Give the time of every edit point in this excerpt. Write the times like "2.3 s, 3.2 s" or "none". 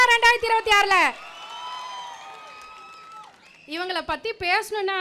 none